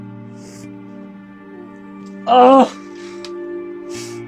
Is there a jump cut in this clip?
no; 0 cuts

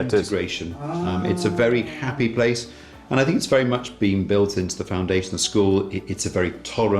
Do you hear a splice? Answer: no; 0 cuts

